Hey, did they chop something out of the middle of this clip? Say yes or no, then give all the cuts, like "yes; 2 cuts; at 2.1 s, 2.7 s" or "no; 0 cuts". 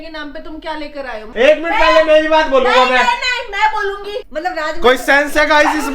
yes; 2 cuts; at 1.3 s, 4.2 s